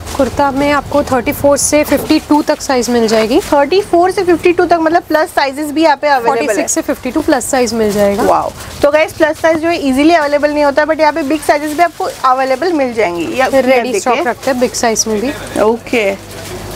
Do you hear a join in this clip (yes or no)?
no